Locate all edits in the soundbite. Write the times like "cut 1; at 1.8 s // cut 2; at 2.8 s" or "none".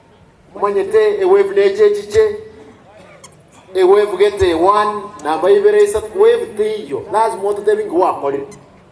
none